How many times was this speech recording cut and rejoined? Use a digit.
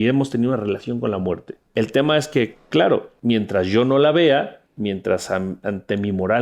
3